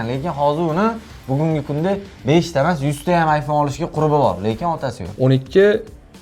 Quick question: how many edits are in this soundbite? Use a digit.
1